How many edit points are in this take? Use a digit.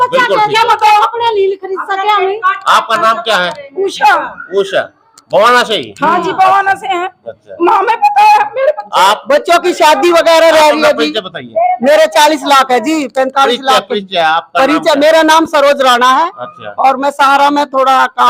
0